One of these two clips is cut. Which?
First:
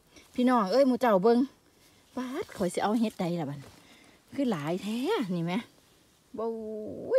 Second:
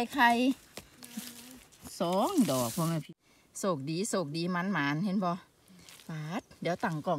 second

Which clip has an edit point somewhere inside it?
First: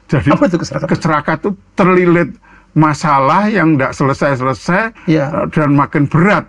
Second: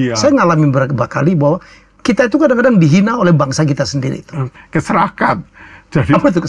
second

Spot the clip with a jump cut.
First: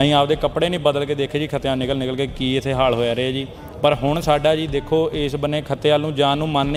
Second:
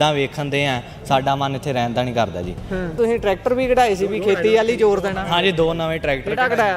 second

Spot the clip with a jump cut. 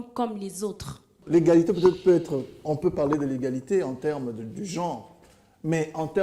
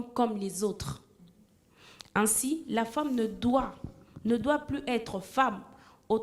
first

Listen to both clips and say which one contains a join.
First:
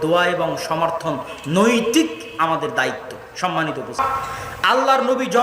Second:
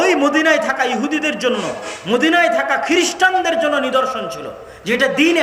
first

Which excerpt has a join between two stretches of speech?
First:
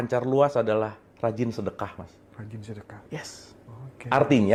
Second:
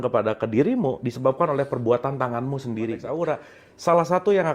second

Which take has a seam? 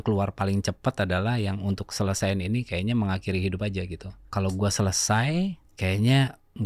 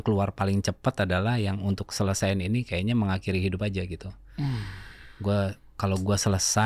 first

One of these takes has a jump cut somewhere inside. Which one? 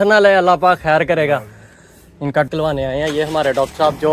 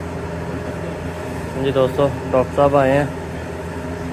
first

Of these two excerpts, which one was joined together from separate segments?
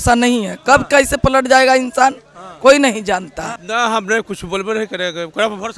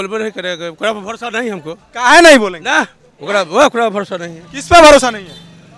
first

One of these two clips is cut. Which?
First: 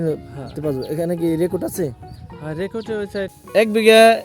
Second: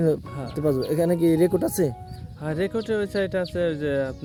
first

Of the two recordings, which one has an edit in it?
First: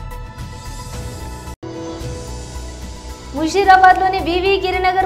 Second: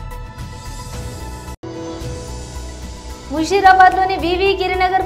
second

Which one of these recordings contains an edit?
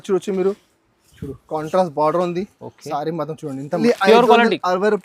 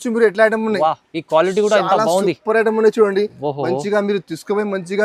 first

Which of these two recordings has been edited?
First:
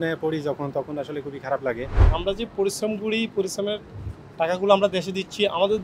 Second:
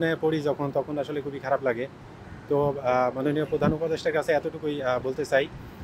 first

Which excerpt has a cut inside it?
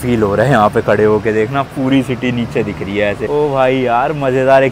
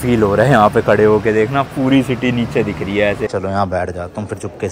second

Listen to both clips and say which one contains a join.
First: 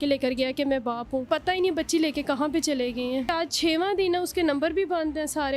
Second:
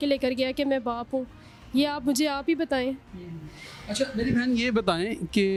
first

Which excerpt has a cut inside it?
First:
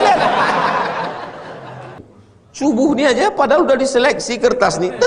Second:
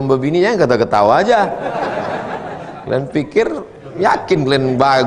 first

